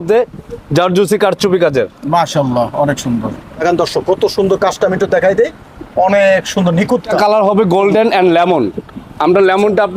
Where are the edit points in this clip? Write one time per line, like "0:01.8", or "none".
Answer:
0:03.6
0:07.1